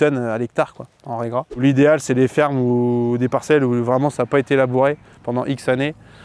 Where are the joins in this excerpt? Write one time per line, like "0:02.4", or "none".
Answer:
0:01.6

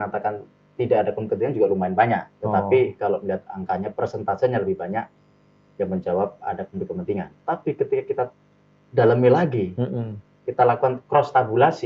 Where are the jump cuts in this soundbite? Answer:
0:07.3

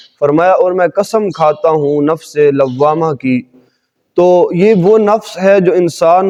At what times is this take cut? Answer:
none

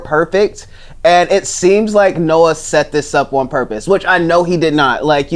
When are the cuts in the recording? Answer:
none

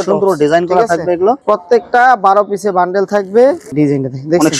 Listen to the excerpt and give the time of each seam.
0:01.4
0:03.7

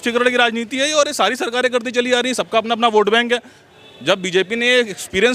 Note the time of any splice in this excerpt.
none

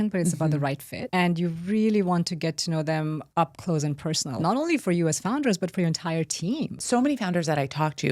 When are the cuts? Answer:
0:00.9
0:03.2
0:04.4
0:06.8

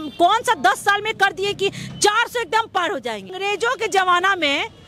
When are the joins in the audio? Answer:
0:03.4

